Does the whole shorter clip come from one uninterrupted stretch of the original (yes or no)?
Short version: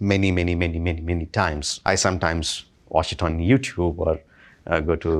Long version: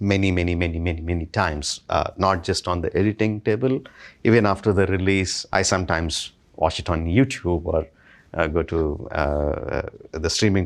no